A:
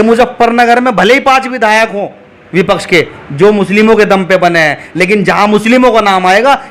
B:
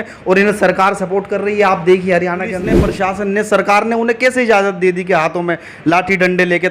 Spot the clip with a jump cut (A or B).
B